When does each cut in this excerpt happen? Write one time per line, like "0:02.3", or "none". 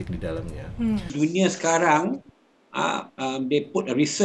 0:01.1